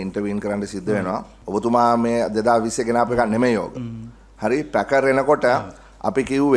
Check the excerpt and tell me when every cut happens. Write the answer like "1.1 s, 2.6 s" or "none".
1.3 s